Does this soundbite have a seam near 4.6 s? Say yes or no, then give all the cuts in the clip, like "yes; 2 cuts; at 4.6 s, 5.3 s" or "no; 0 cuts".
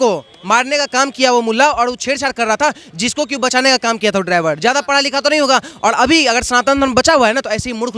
no; 0 cuts